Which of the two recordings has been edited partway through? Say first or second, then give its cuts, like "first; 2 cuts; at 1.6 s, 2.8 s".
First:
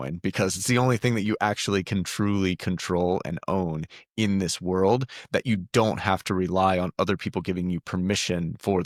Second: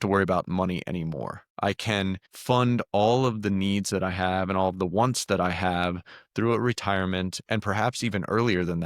second; 2 cuts; at 1.4 s, 2.3 s